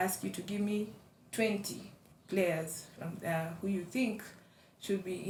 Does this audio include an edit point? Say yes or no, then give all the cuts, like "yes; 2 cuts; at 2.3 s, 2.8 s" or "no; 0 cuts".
no; 0 cuts